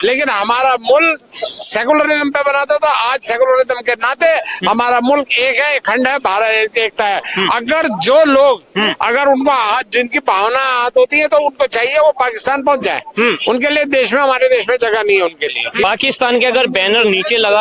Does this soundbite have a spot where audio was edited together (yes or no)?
yes